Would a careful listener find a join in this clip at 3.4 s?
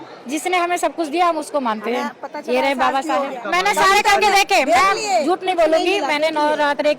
yes; 1 cut; at 3.4 s

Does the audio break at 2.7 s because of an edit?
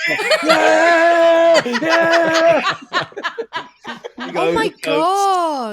no; 1 cut; at 4.3 s

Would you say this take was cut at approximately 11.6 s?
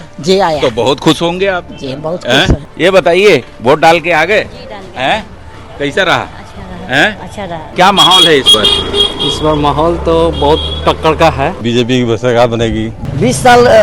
yes; 4 cuts; at 2.7 s, 7.6 s, 11.6 s, 12.9 s

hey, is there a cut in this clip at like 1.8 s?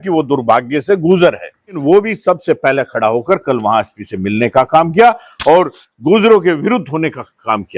yes; 1 cut; at 1.8 s

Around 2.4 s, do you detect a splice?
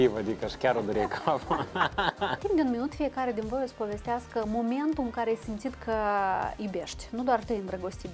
yes; 1 cut; at 2.4 s

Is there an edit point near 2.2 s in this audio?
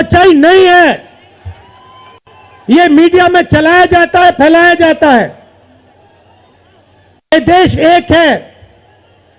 no; 1 cut; at 6.5 s

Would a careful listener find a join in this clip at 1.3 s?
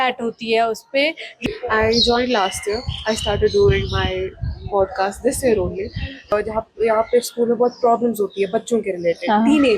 yes; 2 cuts; at 1.3 s, 6.3 s

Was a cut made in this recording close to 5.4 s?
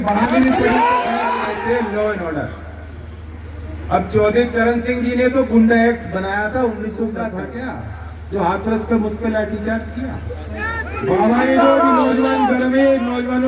no; 3 cuts; at 1.5 s, 7.3 s, 11.0 s

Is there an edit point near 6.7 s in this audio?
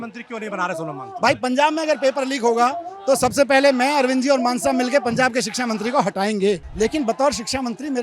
yes; 1 cut; at 6.7 s

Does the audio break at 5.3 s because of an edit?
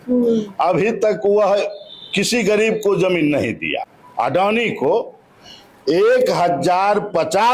no; 1 cut; at 4.0 s

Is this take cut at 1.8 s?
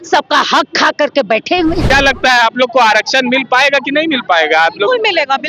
yes; 1 cut; at 1.8 s

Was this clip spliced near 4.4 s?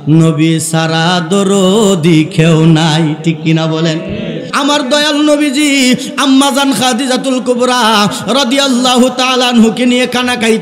yes; 1 cut; at 4.4 s

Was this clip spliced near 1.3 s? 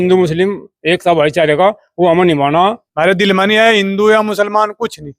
no; 1 cut; at 2.8 s

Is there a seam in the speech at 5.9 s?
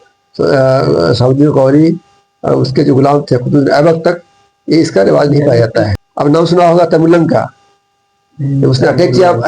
yes; 1 cut; at 5.9 s

